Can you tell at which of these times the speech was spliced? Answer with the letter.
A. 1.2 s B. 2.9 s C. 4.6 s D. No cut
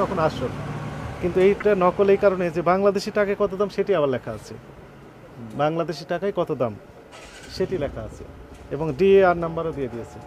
D